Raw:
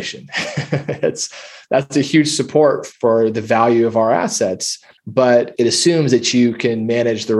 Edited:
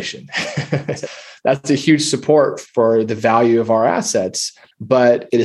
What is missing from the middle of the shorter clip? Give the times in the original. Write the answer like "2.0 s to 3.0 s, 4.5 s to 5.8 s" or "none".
1.0 s to 1.2 s